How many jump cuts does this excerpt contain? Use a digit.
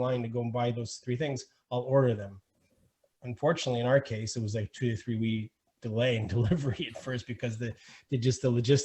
1